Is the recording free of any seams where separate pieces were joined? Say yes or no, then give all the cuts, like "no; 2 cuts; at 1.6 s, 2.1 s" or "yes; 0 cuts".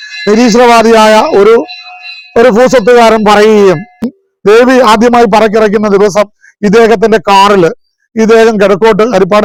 yes; 0 cuts